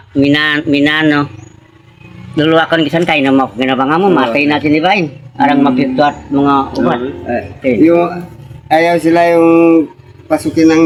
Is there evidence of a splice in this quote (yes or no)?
no